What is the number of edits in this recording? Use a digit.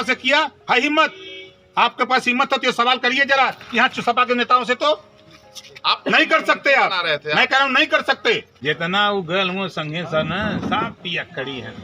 1